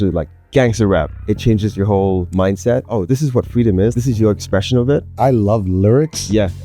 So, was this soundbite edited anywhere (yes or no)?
yes